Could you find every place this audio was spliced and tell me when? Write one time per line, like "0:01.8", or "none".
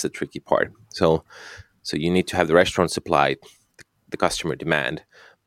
none